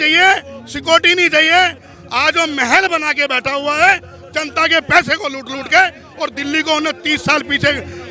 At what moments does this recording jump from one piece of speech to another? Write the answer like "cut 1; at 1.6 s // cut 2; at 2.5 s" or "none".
none